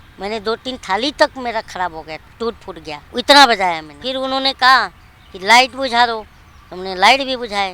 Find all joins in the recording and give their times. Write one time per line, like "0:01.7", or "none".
0:02.3
0:03.0
0:03.9